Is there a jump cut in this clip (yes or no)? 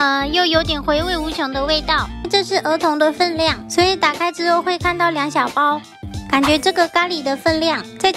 yes